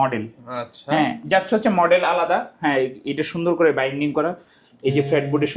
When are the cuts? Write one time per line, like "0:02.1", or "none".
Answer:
none